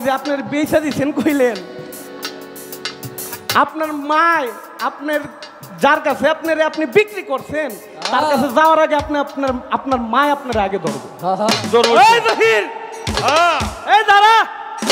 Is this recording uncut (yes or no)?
yes